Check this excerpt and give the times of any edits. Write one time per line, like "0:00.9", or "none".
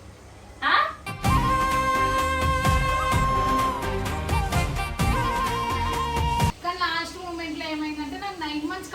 0:06.6